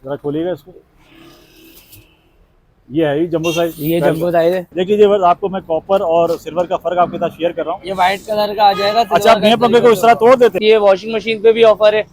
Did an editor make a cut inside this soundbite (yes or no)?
yes